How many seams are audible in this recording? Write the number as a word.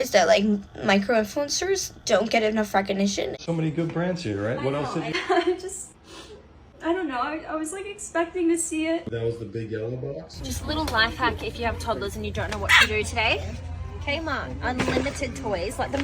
two